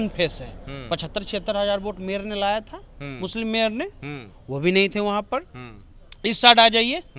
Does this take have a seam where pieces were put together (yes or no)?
no